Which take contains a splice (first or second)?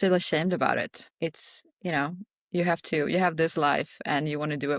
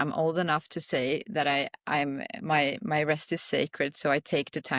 first